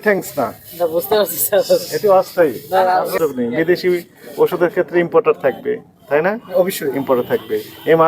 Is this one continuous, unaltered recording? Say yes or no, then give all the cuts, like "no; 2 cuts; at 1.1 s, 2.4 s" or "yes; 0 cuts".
no; 1 cut; at 3.1 s